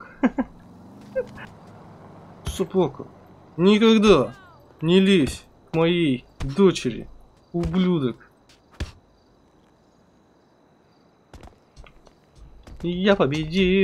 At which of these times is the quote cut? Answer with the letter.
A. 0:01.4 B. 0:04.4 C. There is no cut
A